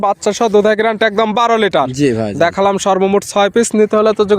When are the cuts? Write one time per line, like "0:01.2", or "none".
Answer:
none